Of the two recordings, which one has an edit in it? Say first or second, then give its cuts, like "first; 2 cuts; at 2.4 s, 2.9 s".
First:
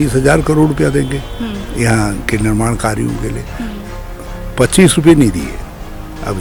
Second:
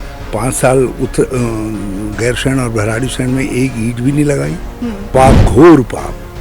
second; 1 cut; at 5.1 s